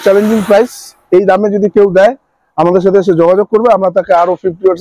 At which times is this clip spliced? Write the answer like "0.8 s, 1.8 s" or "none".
none